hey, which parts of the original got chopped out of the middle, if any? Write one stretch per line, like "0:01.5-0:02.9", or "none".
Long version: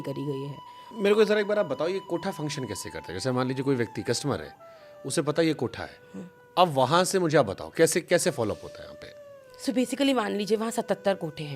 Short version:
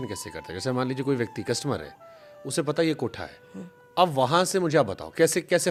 none